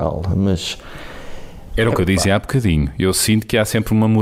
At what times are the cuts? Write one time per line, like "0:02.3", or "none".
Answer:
none

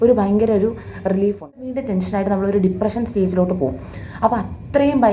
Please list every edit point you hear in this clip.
0:01.8

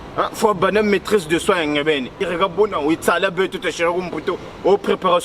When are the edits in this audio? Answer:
0:02.2

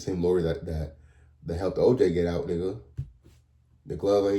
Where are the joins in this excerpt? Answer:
none

